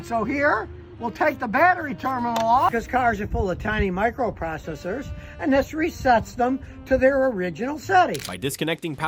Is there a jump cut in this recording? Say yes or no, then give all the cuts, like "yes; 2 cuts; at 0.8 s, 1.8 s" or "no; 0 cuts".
no; 0 cuts